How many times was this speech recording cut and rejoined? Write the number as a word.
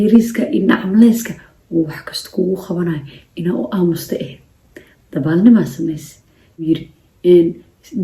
one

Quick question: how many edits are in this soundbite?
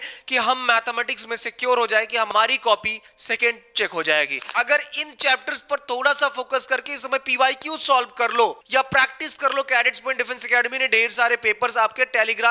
three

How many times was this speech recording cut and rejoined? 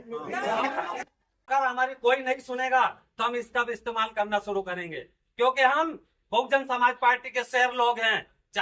one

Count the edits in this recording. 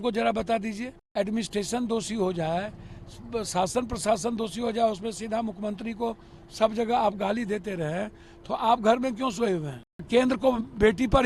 two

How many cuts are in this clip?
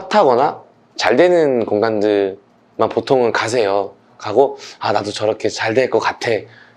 zero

